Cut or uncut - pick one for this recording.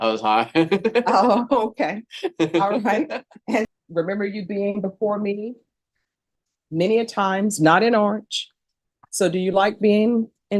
cut